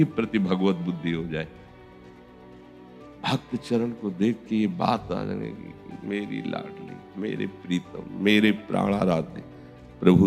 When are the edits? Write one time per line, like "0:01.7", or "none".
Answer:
0:01.5
0:03.2